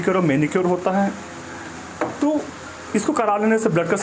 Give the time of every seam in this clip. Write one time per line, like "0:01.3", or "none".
0:02.1